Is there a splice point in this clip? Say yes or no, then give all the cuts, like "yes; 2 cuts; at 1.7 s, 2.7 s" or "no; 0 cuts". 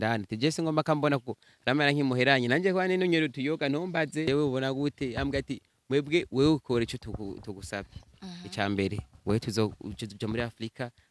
yes; 1 cut; at 4.3 s